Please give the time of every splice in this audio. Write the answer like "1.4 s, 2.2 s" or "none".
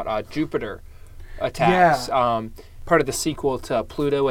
2.7 s